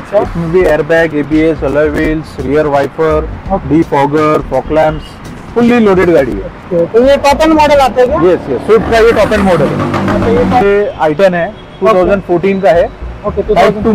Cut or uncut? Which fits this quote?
cut